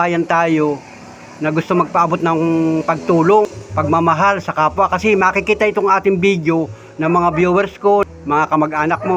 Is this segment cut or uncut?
cut